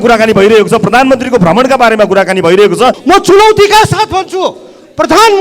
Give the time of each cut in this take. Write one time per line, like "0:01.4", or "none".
0:03.0